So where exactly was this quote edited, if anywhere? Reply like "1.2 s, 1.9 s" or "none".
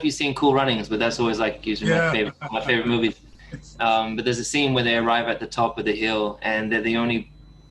none

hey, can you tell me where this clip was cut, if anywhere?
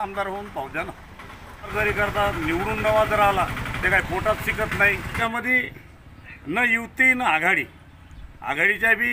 1.7 s, 5.2 s

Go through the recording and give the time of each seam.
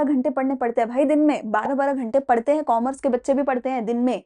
none

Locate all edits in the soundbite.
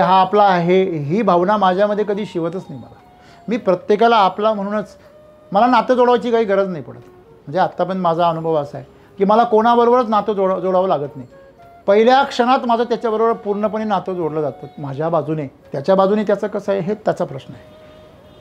15.6 s

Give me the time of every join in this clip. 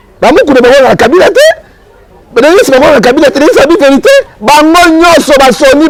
none

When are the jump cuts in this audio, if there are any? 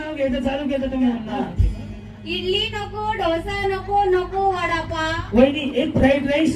1.6 s

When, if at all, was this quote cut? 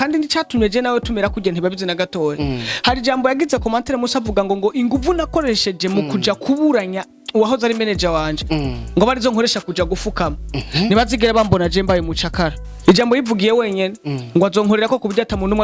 12.7 s

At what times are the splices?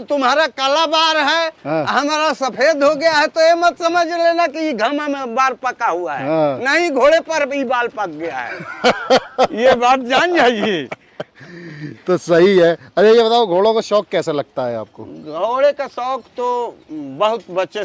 none

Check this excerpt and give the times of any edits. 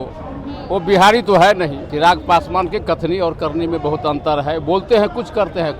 1.8 s

